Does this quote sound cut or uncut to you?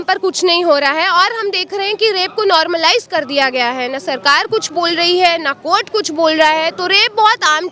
uncut